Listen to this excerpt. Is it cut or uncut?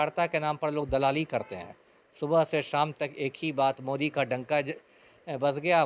uncut